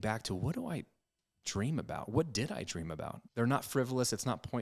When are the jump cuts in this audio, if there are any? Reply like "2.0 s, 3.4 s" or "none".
3.2 s